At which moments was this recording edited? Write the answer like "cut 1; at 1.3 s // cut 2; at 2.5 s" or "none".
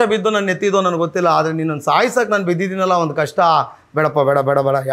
none